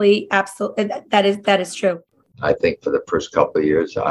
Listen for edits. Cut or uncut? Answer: cut